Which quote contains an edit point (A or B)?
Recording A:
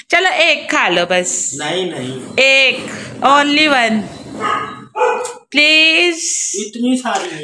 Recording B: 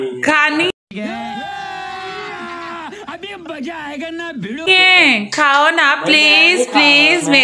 B